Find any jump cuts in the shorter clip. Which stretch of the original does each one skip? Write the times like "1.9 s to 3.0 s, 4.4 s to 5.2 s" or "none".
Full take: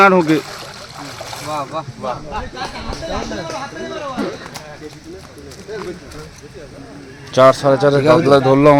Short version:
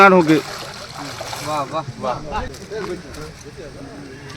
2.5 s to 5.5 s

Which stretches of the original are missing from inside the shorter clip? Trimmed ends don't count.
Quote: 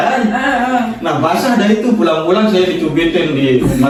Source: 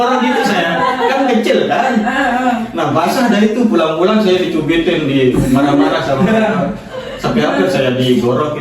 none

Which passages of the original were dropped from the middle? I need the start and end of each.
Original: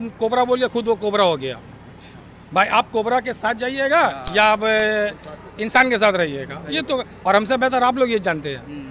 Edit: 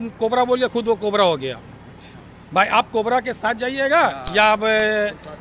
none

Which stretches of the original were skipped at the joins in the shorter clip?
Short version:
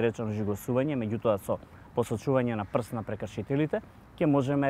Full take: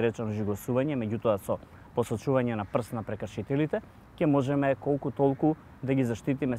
none

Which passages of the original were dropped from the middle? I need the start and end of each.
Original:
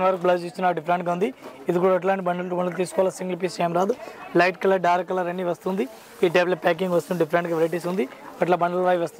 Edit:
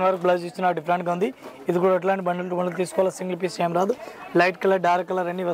none

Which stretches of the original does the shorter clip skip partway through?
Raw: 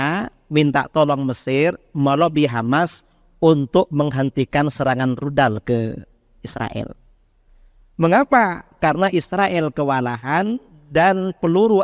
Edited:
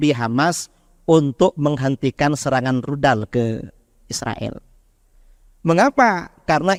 none

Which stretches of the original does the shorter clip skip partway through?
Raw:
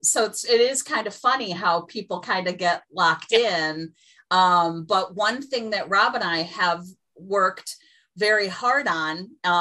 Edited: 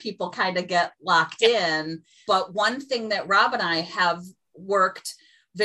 4.1 s to 4.8 s

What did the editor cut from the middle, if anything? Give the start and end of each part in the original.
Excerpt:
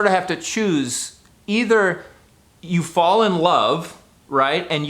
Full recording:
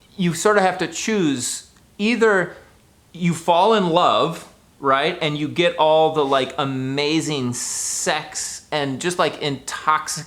none

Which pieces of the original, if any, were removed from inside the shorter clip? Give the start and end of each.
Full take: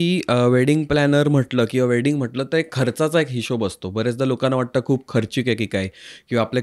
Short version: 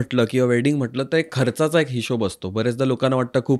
none

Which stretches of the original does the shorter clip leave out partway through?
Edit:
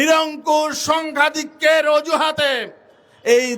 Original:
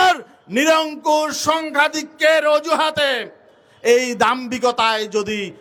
none

